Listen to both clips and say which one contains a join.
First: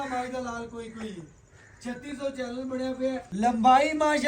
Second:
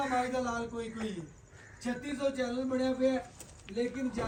first; 1 cut; at 3.3 s

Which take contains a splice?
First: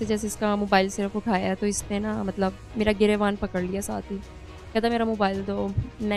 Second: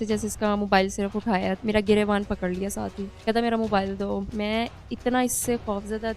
second; 3 cuts; at 1.6 s, 3.0 s, 4.3 s

